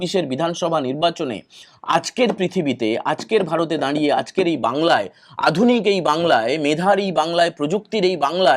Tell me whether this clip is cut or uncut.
uncut